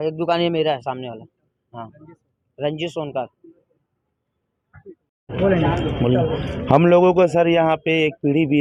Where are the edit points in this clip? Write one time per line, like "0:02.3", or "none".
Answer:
none